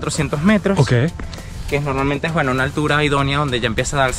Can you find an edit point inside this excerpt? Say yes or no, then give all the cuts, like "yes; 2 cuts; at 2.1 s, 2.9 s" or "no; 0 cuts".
no; 0 cuts